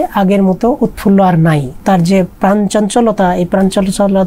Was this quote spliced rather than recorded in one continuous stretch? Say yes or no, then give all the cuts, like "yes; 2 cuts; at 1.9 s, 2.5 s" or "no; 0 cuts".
yes; 1 cut; at 1.8 s